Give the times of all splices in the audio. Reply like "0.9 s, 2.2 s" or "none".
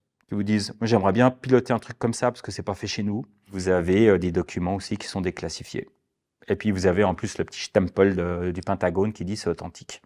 3.5 s

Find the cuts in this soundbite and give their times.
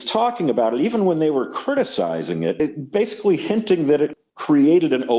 2.6 s, 4.3 s

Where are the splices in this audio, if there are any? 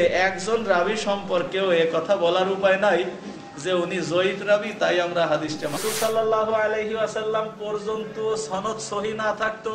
5.8 s

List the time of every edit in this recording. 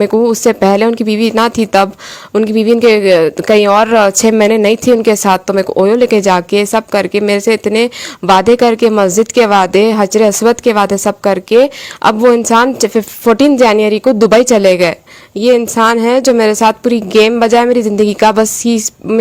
none

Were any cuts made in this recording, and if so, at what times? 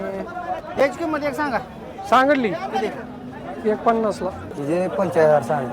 4.5 s

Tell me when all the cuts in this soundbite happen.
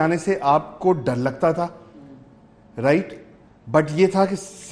none

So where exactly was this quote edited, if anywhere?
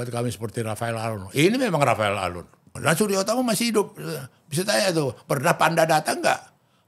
2.7 s

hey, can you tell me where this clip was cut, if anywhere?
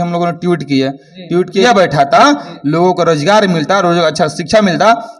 1.6 s

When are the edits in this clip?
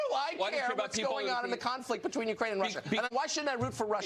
3.1 s

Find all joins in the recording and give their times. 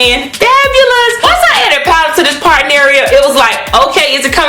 1.2 s

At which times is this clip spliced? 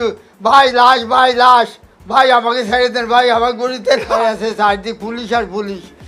4.2 s

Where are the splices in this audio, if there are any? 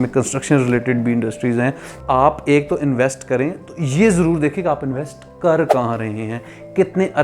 1.9 s

